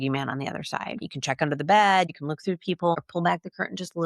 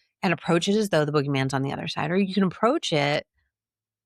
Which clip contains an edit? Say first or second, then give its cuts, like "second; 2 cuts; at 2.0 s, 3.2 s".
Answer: first; 2 cuts; at 1.0 s, 2.7 s